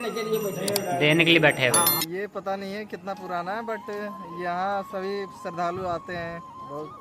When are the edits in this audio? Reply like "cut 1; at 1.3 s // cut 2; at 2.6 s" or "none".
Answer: cut 1; at 2.0 s